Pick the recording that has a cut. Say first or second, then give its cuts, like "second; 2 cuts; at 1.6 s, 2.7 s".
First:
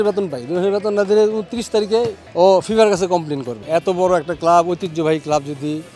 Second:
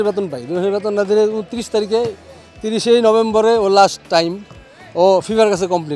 first; 2 cuts; at 2.2 s, 3.5 s